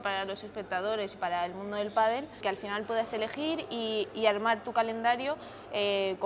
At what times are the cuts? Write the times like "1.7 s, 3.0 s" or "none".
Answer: 2.3 s